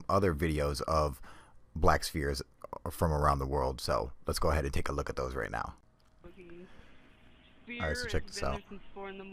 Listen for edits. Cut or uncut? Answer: cut